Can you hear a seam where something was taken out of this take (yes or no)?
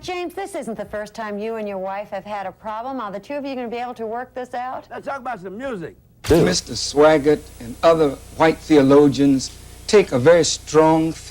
yes